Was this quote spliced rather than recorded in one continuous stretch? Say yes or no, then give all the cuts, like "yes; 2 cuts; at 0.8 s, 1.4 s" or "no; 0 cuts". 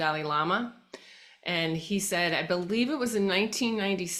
no; 0 cuts